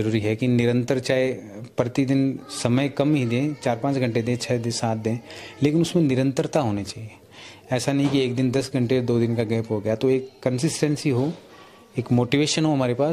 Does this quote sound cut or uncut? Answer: uncut